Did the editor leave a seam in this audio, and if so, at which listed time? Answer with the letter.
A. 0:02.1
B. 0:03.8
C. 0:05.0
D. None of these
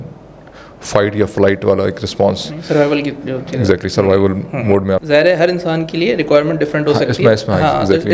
C